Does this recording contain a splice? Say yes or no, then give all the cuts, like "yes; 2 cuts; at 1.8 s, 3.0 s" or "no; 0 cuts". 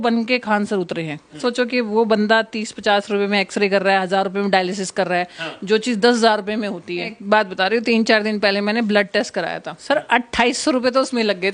yes; 3 cuts; at 1.4 s, 7.1 s, 9.8 s